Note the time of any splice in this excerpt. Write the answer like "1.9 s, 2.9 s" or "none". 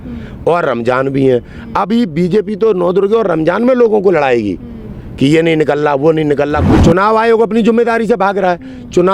6.7 s